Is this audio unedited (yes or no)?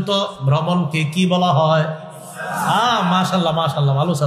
yes